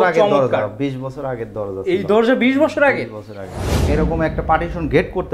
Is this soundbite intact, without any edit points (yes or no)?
no